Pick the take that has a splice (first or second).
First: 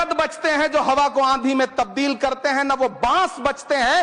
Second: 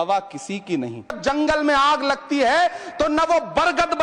second